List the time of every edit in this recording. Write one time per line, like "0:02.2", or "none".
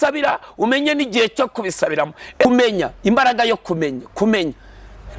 0:02.4